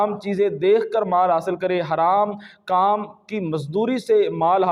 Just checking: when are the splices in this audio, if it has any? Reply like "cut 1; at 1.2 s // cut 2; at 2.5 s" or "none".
none